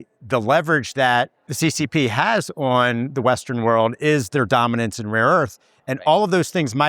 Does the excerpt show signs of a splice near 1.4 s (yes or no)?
yes